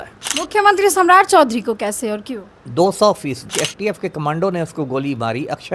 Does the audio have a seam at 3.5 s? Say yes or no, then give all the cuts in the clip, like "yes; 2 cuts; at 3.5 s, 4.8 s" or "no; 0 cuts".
yes; 1 cut; at 3.5 s